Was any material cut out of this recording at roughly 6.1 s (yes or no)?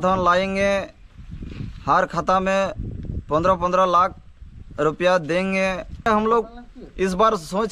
yes